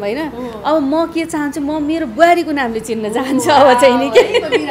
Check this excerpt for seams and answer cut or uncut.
uncut